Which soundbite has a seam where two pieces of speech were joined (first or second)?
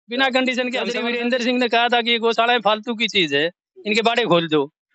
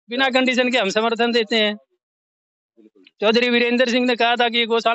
first